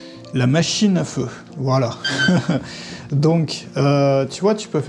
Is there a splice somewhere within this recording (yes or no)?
no